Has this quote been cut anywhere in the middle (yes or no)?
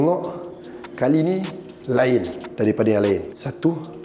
no